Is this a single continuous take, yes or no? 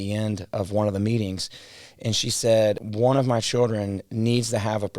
no